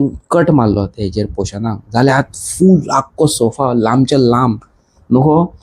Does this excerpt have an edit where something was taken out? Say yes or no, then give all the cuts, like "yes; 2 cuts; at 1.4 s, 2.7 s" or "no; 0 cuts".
no; 0 cuts